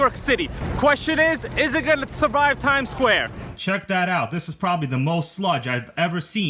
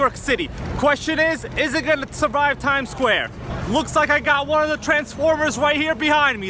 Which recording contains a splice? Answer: first; 1 cut; at 3.5 s

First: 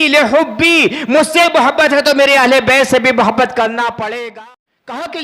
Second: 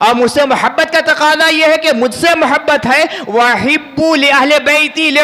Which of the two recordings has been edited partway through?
first; 1 cut; at 4.1 s

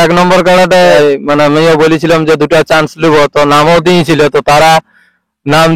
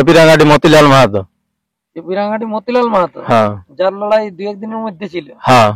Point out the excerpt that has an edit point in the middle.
first; 1 cut; at 0.9 s

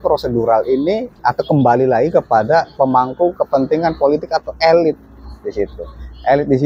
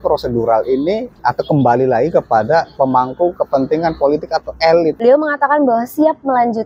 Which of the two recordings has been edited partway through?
second; 1 cut; at 5.0 s

